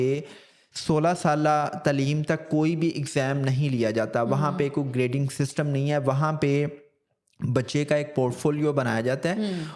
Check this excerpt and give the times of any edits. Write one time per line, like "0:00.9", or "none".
none